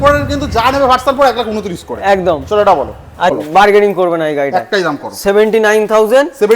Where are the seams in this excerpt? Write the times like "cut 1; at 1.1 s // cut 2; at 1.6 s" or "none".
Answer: cut 1; at 3.4 s

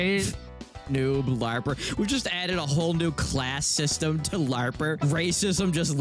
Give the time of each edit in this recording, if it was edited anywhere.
cut 1; at 5.0 s

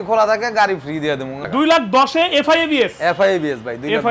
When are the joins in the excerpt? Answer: cut 1; at 1.4 s

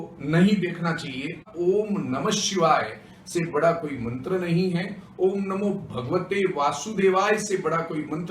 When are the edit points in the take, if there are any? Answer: cut 1; at 1.5 s

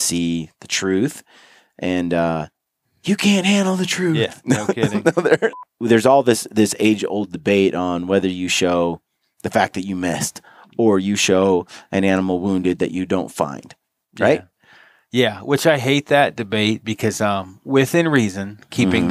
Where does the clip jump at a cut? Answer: cut 1; at 5.6 s

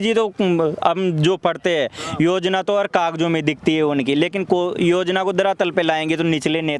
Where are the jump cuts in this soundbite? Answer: none

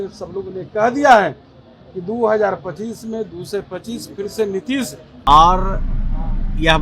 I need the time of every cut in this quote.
cut 1; at 5.1 s

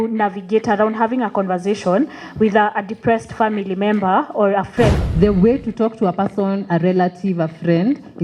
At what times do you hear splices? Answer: cut 1; at 5.0 s

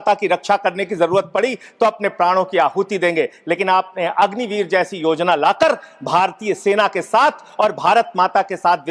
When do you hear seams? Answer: none

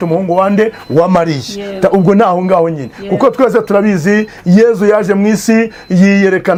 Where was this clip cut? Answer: none

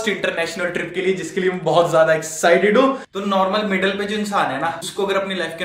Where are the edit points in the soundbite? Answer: cut 1; at 3.0 s // cut 2; at 4.8 s

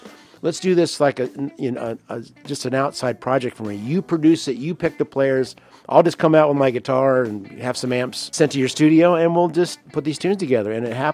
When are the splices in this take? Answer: cut 1; at 8.3 s // cut 2; at 9.8 s

